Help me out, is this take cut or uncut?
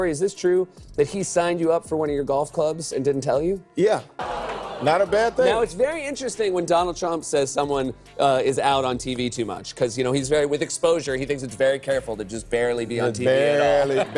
cut